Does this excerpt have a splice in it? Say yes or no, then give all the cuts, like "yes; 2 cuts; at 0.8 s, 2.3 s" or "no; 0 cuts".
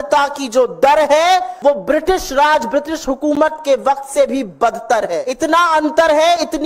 yes; 2 cuts; at 1.5 s, 5.2 s